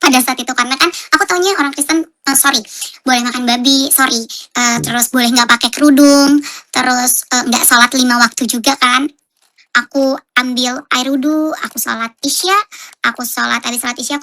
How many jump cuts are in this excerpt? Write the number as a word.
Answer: one